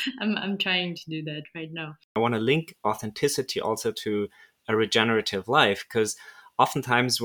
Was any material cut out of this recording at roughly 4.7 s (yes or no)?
no